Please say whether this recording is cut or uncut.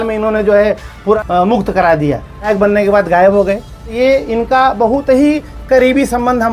cut